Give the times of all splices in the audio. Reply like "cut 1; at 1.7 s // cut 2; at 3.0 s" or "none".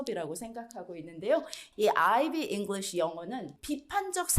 cut 1; at 1.6 s // cut 2; at 3.5 s

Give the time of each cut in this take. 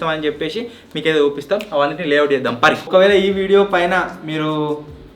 cut 1; at 2.8 s

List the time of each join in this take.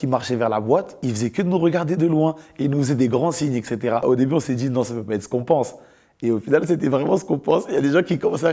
cut 1; at 0.9 s // cut 2; at 4.0 s

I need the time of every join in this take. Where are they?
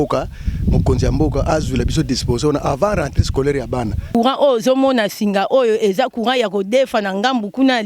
cut 1; at 4.1 s

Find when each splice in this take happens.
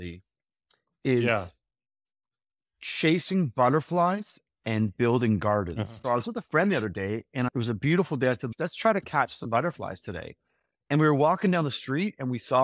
cut 1; at 5.9 s // cut 2; at 7.5 s // cut 3; at 8.4 s

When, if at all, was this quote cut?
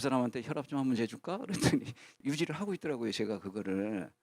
none

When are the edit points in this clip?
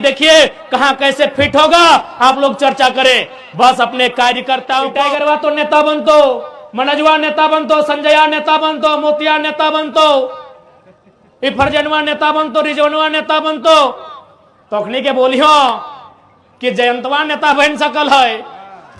cut 1; at 5.0 s

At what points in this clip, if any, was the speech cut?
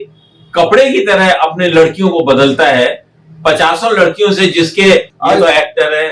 cut 1; at 5.1 s

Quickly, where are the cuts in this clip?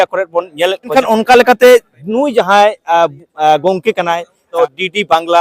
cut 1; at 0.9 s // cut 2; at 4.4 s

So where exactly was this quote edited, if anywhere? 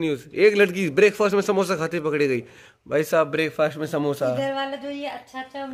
none

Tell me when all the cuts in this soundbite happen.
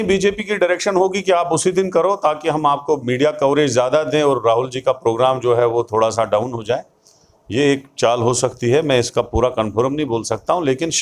none

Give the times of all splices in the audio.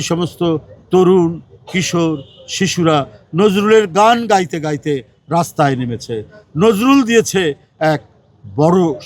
none

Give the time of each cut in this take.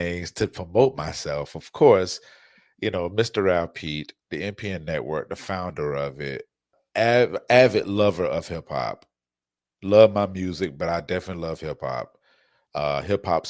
cut 1; at 6.8 s

